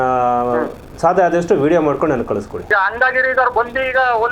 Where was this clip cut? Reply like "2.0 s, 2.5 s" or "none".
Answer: 2.7 s